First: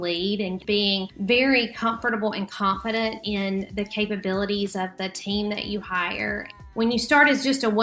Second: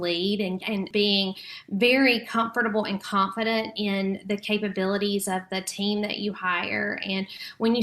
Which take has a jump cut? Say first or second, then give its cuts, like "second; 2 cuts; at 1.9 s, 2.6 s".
first; 2 cuts; at 0.8 s, 6.5 s